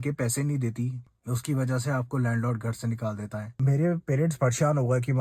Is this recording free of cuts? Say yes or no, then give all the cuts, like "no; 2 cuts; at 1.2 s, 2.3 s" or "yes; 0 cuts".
no; 2 cuts; at 1.0 s, 3.6 s